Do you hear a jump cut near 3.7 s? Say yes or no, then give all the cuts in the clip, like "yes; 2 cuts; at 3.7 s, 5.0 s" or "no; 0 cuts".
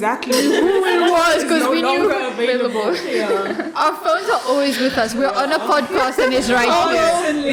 no; 0 cuts